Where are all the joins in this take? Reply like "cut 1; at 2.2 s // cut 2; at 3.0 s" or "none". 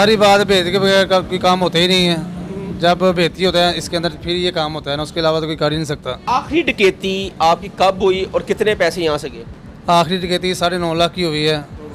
cut 1; at 6.2 s